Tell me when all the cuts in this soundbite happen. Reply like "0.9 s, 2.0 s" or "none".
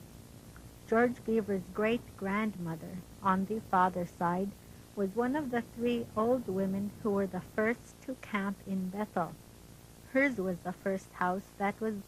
10.8 s